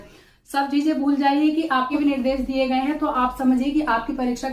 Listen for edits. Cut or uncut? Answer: cut